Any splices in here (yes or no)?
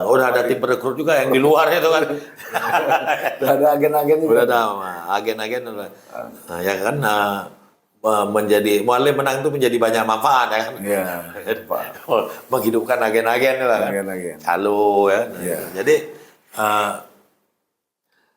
no